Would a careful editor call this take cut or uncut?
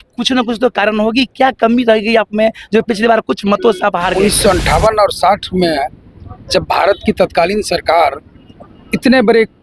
cut